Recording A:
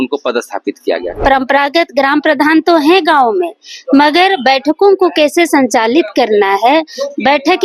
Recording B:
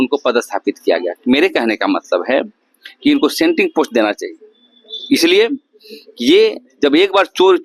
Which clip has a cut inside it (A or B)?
A